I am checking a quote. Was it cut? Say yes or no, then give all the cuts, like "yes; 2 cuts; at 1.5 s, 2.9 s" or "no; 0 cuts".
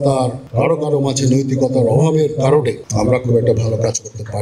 yes; 1 cut; at 2.8 s